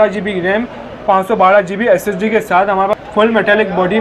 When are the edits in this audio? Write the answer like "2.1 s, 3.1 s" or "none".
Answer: 2.9 s